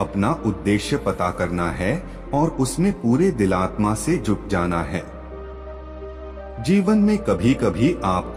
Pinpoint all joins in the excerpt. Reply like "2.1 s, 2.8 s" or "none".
none

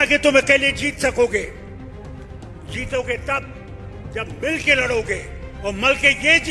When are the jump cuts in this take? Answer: 1.5 s, 2.7 s

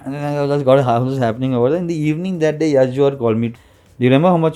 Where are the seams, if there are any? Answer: 3.6 s

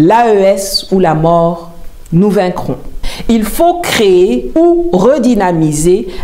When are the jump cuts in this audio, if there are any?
3.1 s

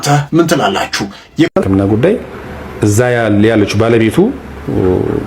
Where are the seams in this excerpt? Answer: 1.5 s

